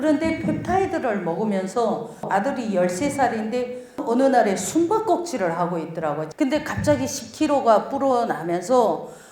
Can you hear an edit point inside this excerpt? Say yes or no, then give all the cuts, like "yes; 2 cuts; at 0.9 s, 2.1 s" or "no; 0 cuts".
yes; 3 cuts; at 2.3 s, 4.0 s, 6.2 s